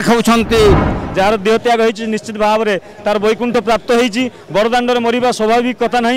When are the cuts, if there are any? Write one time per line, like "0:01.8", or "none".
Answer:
0:00.9